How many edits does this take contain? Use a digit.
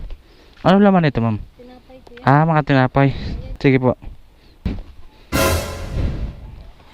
1